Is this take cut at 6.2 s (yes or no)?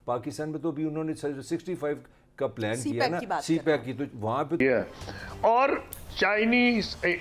no